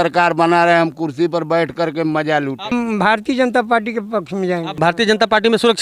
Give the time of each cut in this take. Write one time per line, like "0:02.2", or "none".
0:02.7
0:04.7